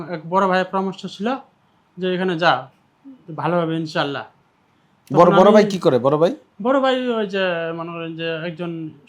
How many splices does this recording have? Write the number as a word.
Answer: zero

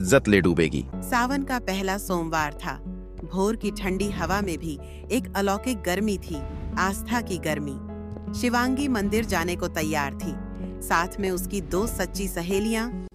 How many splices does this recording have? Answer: zero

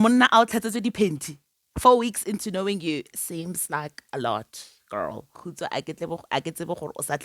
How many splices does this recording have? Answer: one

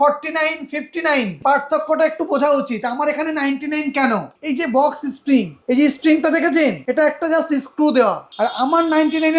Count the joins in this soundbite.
five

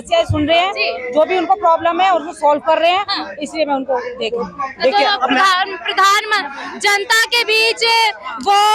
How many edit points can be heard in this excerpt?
zero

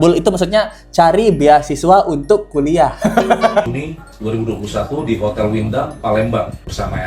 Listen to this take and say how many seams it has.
one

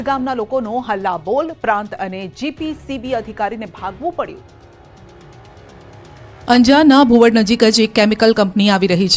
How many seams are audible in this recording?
zero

